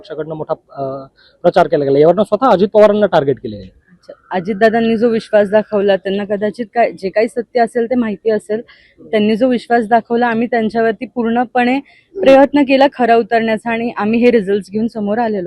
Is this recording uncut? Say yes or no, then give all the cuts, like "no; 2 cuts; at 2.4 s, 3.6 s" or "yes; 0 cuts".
yes; 0 cuts